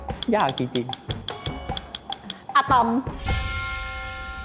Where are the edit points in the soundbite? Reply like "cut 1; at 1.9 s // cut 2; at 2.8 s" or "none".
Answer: none